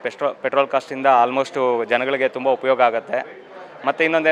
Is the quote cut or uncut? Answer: uncut